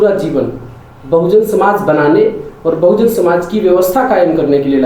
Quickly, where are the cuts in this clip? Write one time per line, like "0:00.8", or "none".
none